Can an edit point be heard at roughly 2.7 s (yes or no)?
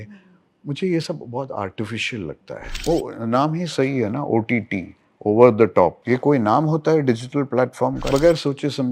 yes